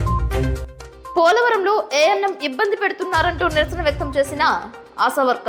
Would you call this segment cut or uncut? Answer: uncut